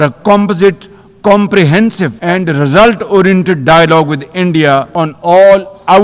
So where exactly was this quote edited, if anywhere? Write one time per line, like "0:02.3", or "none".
0:02.2
0:04.9